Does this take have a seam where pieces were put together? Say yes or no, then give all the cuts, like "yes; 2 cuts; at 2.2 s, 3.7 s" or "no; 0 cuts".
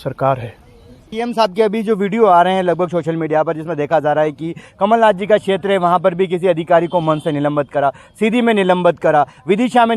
yes; 1 cut; at 1.1 s